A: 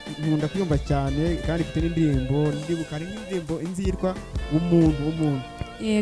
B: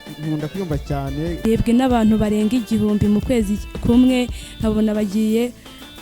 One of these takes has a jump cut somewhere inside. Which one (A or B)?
B